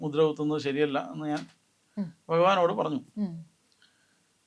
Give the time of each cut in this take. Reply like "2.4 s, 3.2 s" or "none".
none